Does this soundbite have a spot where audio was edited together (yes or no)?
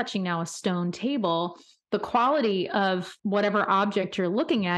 yes